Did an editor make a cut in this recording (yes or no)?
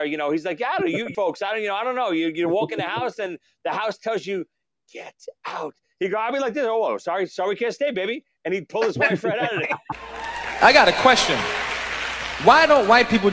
yes